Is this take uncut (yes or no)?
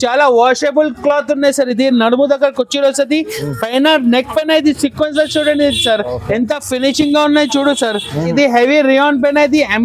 no